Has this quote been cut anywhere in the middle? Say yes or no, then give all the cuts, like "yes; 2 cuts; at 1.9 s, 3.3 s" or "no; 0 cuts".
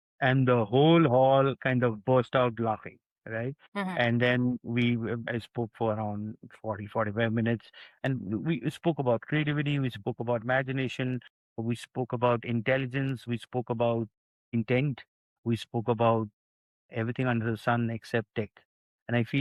no; 0 cuts